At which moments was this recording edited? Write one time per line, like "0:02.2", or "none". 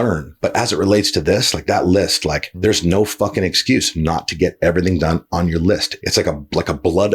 0:02.5
0:05.9

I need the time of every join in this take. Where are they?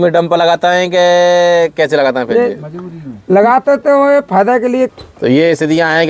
0:04.9

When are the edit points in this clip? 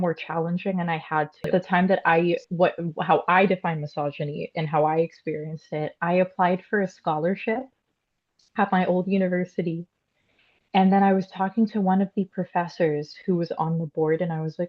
0:01.5

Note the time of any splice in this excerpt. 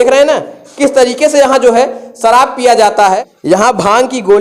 0:03.3

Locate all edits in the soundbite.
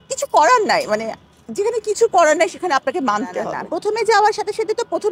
0:03.6

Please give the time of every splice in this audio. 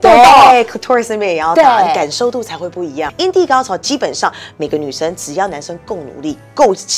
0:03.0

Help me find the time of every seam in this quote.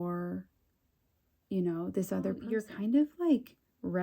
0:02.5

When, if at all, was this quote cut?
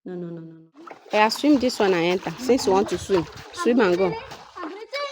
0:01.0

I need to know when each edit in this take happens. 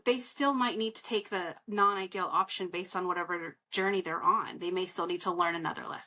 none

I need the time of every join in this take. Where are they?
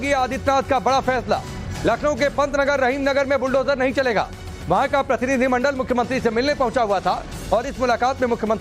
0:01.0

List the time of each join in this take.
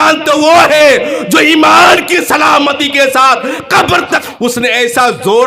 0:04.2

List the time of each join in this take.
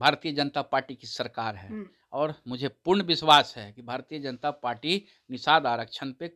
none

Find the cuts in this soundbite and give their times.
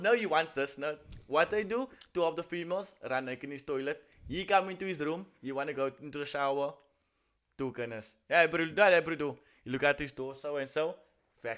none

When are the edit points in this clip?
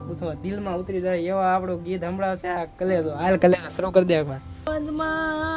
0:04.7

